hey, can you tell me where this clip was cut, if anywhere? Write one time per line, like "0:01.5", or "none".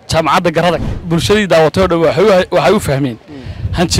0:00.9